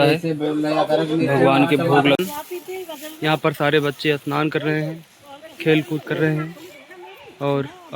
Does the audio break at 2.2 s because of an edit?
yes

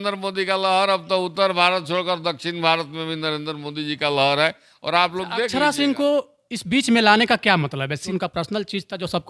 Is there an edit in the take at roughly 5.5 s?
yes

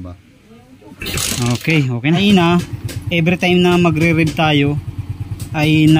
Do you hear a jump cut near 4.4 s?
no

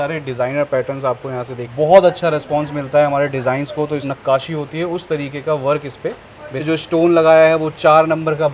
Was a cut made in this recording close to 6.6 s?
yes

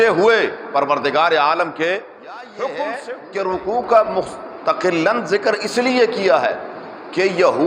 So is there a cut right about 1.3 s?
no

